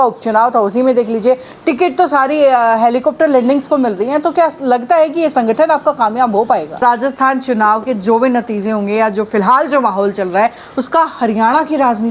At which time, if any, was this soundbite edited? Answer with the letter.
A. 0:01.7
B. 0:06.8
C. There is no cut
B